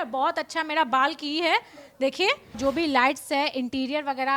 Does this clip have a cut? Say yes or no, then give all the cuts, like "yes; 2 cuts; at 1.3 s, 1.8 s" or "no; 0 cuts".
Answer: yes; 1 cut; at 2.6 s